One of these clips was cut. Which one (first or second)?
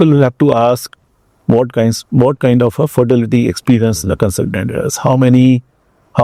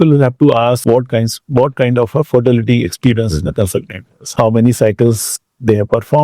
second